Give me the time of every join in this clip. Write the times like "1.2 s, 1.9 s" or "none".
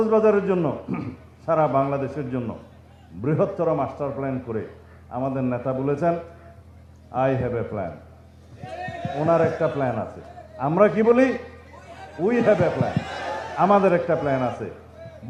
none